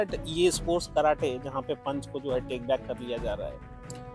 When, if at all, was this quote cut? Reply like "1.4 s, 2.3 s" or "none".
none